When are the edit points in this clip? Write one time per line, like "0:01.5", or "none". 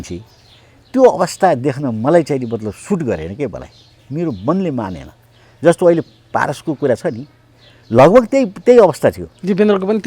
none